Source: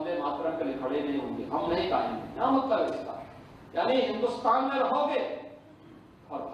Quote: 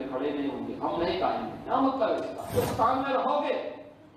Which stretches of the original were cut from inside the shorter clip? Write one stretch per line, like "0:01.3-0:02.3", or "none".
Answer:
0:03.2-0:04.2